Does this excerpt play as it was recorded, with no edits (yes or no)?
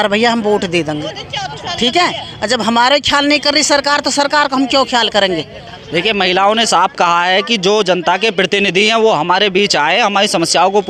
yes